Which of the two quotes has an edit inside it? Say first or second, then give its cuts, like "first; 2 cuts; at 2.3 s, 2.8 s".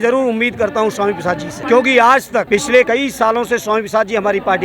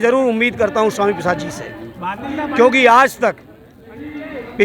first; 2 cuts; at 1.6 s, 2.7 s